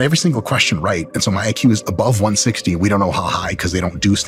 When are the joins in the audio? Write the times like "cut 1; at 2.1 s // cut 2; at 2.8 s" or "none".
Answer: none